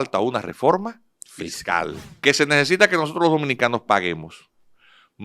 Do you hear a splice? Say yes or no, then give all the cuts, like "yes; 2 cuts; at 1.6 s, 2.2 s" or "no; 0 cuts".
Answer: yes; 1 cut; at 2.0 s